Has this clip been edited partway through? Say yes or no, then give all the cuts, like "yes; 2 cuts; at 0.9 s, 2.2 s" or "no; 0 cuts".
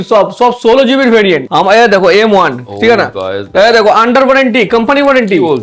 yes; 1 cut; at 1.4 s